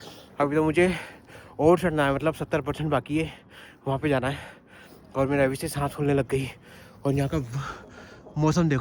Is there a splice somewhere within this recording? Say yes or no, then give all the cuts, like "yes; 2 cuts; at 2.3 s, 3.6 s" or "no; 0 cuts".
no; 0 cuts